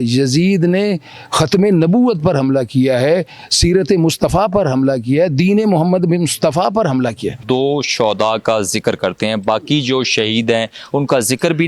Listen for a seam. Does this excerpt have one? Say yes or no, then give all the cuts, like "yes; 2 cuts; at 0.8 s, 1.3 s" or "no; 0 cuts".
yes; 1 cut; at 7.4 s